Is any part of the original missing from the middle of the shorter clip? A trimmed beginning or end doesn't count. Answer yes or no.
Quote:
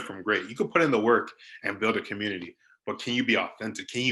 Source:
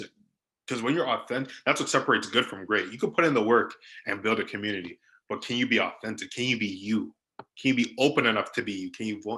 no